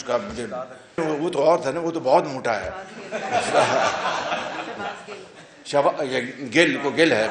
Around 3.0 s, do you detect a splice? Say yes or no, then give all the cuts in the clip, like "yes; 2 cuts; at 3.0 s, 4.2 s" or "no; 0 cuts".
no; 1 cut; at 1.0 s